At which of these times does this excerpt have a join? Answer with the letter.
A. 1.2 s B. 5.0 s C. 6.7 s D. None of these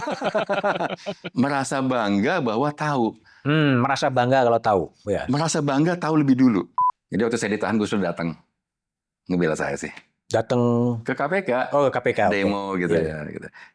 C